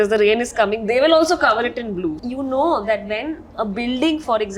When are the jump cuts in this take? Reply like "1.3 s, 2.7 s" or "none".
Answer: 2.2 s